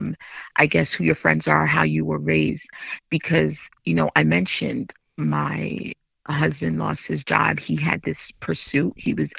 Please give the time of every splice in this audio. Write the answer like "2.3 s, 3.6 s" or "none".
none